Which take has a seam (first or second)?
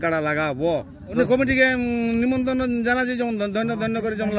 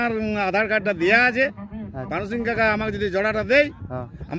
first